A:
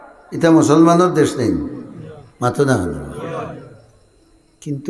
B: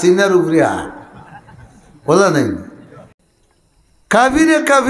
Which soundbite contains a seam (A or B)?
B